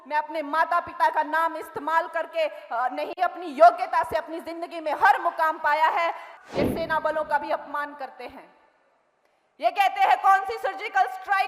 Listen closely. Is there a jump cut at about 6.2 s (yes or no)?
yes